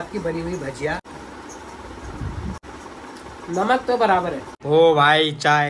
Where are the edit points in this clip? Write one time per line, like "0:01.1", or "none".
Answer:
0:01.1
0:02.6
0:04.5